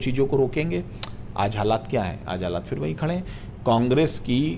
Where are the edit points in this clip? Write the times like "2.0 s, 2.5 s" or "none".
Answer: none